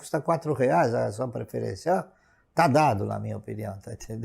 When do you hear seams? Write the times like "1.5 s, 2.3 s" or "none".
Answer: none